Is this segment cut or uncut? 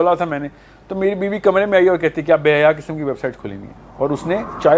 uncut